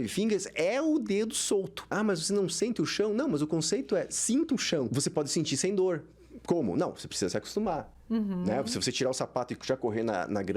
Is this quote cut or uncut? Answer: cut